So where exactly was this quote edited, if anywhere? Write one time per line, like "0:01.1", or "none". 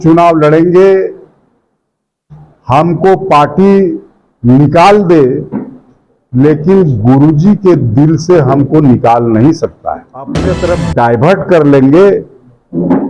0:10.5